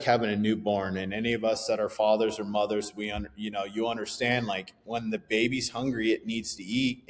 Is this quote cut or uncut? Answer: uncut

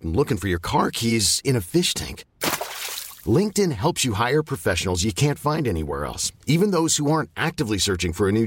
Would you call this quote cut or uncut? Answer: uncut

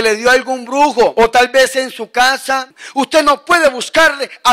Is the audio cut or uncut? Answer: cut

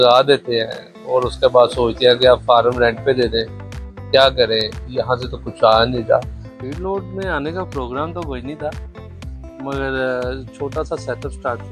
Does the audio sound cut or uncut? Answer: cut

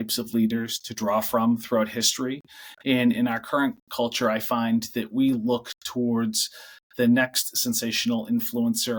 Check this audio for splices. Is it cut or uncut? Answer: uncut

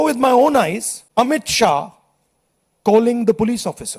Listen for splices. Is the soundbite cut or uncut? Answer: cut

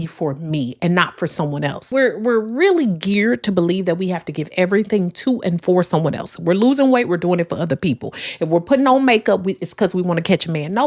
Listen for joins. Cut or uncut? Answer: cut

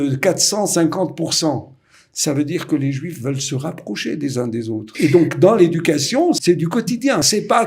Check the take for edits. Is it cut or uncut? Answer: cut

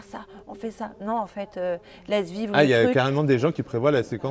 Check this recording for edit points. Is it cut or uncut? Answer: uncut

